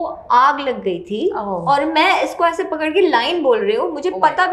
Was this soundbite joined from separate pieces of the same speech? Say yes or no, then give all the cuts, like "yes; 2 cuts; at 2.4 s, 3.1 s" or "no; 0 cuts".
no; 0 cuts